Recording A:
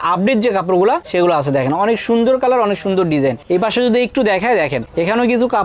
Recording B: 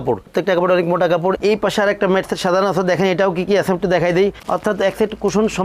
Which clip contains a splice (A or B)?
B